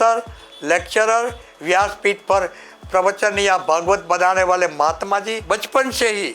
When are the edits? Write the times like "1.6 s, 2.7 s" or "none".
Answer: 5.4 s